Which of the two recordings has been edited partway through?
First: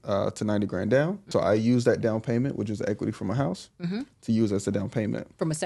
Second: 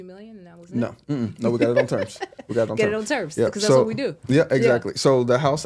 first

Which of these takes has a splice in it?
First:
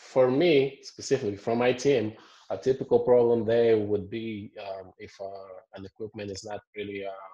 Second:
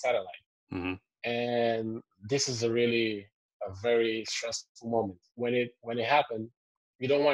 second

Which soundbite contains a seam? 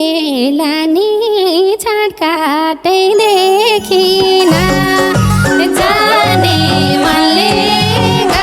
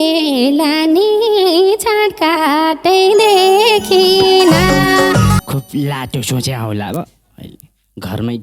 second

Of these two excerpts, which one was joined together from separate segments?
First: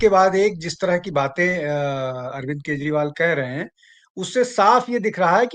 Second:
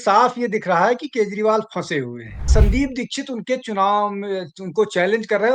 second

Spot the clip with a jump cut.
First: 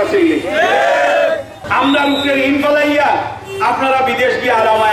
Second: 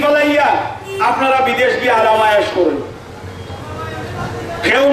first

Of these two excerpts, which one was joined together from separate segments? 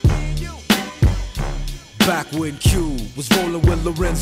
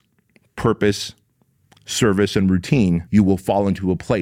second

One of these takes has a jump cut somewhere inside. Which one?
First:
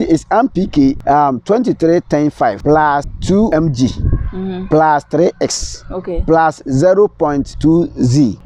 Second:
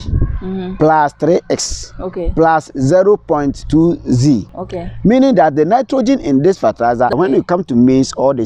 second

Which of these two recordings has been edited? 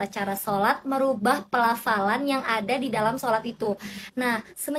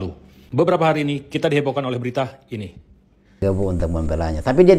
second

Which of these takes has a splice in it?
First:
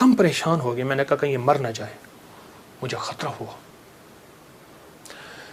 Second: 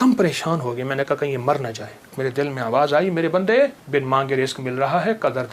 second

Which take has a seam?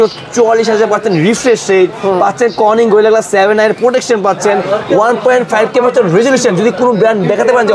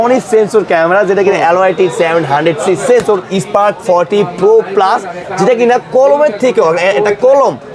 second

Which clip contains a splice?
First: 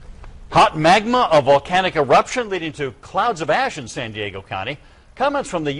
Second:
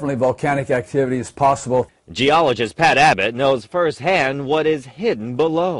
second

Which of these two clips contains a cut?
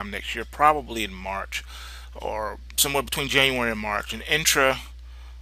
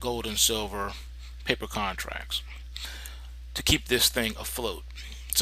second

